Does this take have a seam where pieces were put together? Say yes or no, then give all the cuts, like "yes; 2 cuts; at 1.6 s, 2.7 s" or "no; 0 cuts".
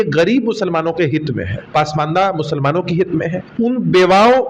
yes; 2 cuts; at 1.5 s, 3.4 s